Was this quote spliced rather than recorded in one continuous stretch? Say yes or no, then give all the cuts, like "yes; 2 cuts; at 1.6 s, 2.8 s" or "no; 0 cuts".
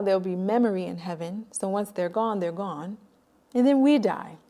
no; 0 cuts